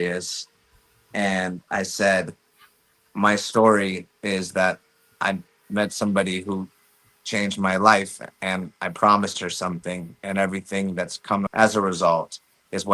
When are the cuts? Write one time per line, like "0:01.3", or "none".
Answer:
0:11.5